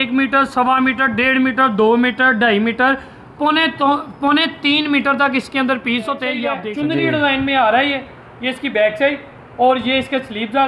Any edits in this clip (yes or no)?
yes